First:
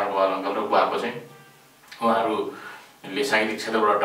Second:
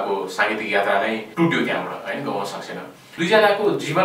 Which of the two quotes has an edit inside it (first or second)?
second